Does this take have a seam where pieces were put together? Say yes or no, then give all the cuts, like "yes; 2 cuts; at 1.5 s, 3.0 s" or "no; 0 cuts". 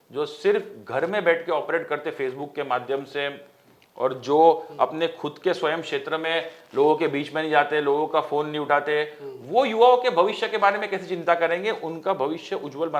no; 0 cuts